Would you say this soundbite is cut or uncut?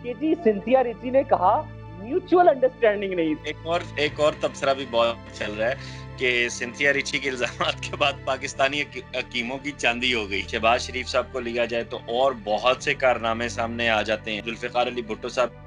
cut